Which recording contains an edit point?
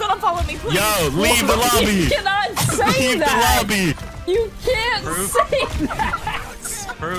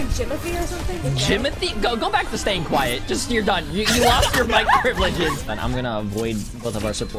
second; 2 cuts; at 1.0 s, 5.4 s

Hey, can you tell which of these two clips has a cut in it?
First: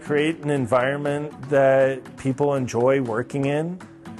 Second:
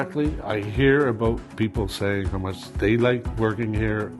second; 2 cuts; at 2.6 s, 3.3 s

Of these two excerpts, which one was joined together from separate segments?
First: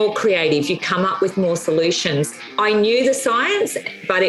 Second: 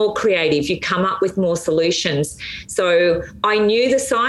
first; 1 cut; at 2.5 s

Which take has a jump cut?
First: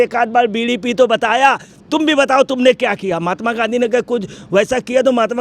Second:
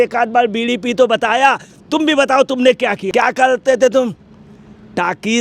second; 1 cut; at 3.1 s

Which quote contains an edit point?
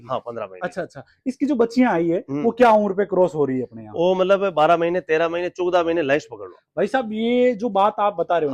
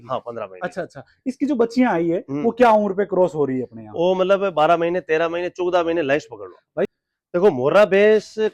second; 1 cut; at 6.9 s

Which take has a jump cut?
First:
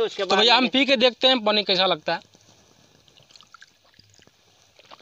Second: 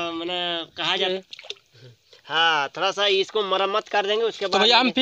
second; 1 cut; at 1.1 s

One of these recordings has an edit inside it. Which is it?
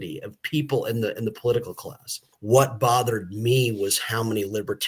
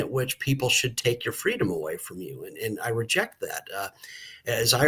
first; 1 cut; at 2.3 s

